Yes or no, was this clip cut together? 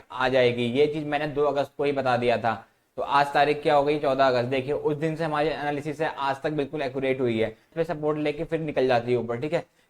yes